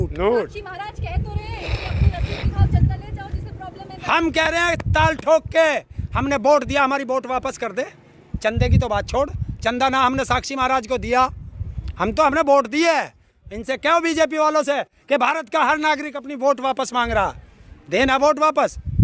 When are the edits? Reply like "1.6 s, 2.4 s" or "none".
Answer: none